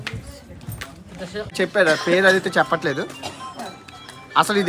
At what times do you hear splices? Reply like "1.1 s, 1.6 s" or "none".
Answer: 1.5 s